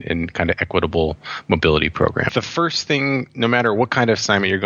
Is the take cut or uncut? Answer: cut